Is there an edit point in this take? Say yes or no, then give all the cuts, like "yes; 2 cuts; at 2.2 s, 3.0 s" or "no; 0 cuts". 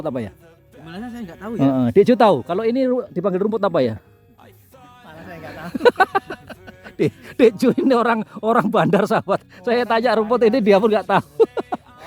no; 0 cuts